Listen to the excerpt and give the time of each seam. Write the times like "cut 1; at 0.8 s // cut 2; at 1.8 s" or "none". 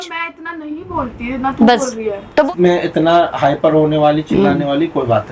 cut 1; at 2.5 s